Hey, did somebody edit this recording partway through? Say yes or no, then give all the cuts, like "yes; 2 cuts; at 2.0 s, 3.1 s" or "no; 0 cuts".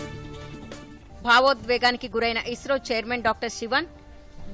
yes; 1 cut; at 1.0 s